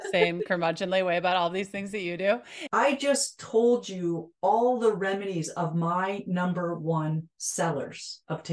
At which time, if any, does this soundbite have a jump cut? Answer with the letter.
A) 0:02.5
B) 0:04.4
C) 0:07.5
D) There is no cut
A